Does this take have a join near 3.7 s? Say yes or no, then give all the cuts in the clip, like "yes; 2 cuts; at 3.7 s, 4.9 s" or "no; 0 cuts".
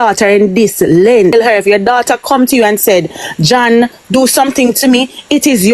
no; 1 cut; at 1.3 s